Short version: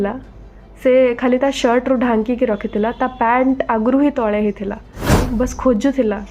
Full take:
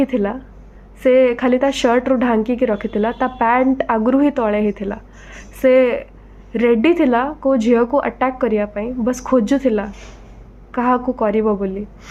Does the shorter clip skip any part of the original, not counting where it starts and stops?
yes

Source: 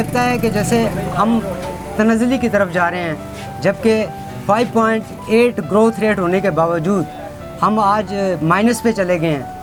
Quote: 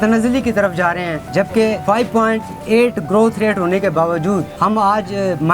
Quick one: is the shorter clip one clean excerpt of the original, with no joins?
no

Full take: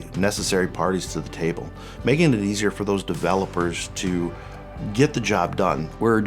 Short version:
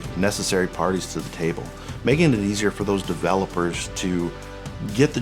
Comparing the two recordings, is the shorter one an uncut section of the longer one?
yes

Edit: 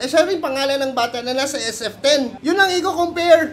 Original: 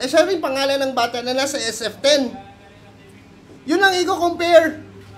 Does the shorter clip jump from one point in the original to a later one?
yes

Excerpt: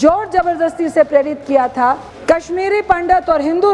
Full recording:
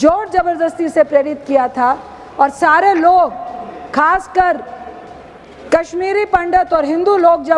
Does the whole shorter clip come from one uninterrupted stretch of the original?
no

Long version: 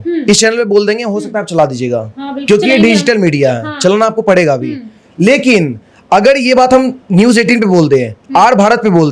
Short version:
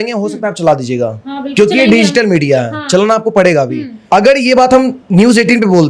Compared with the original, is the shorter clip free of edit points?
no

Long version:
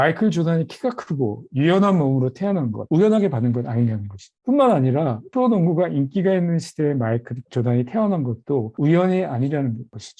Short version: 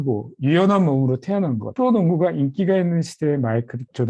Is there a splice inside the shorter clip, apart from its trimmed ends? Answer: yes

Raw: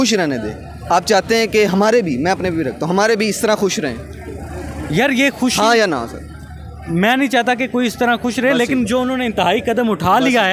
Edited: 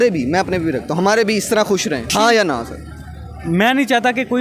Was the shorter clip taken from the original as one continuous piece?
no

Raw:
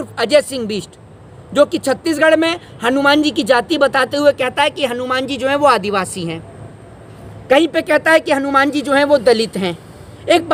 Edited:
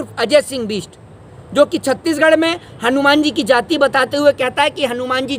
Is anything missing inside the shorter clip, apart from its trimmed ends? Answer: no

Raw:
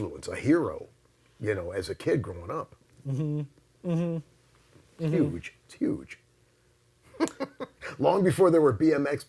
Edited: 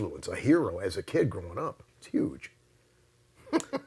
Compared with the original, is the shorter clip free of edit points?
no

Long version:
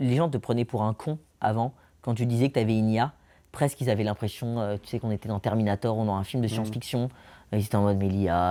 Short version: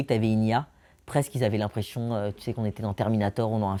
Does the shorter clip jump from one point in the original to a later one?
no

